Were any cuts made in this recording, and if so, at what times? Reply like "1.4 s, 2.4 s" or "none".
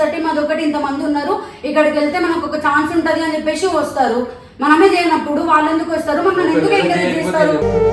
none